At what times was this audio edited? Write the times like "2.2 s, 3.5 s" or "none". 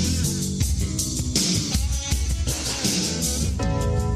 none